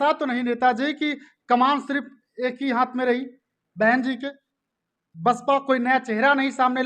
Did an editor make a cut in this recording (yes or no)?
no